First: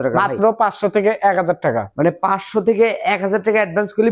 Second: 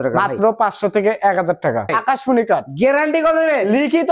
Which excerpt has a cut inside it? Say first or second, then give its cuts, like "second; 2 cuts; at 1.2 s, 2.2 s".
second; 1 cut; at 1.9 s